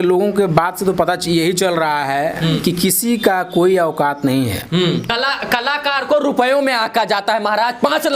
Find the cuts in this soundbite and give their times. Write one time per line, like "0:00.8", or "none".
0:05.1